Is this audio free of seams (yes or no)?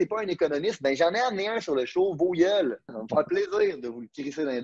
no